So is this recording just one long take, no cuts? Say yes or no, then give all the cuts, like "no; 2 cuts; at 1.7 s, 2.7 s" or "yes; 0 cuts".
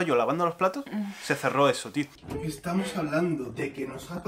no; 1 cut; at 2.1 s